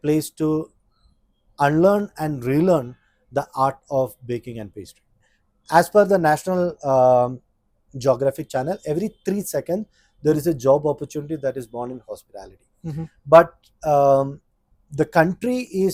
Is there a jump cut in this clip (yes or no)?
no